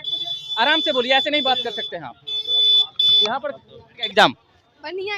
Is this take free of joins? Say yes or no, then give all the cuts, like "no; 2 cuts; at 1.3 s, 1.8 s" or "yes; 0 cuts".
no; 1 cut; at 4.0 s